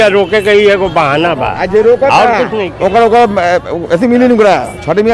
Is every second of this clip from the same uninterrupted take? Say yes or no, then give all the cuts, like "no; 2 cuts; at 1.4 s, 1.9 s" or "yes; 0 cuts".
yes; 0 cuts